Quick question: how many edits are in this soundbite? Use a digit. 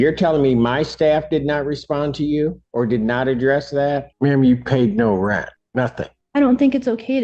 3